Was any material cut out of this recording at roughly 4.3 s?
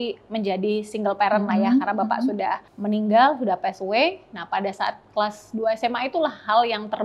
no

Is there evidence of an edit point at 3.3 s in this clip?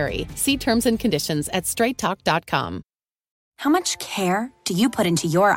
yes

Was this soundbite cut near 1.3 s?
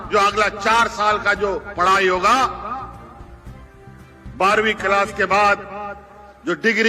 no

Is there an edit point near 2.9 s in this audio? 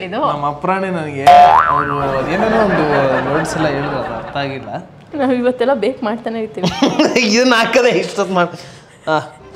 no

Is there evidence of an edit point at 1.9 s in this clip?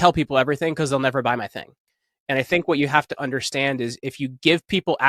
no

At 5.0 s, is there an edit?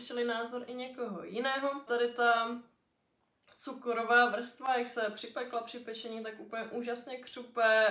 no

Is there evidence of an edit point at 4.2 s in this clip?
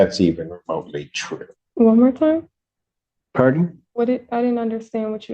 no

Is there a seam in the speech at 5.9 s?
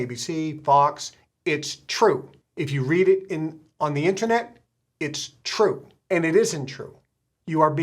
yes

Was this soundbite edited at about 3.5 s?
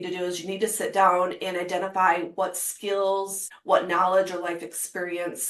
yes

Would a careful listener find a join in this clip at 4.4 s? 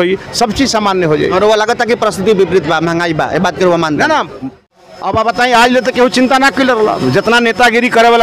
yes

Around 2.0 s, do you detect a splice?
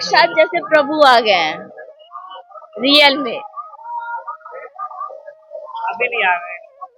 no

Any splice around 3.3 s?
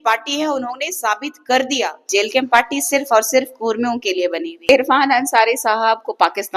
no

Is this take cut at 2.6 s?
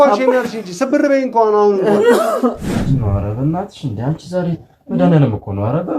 yes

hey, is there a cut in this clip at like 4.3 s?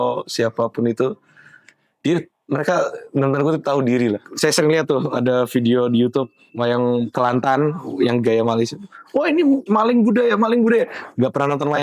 yes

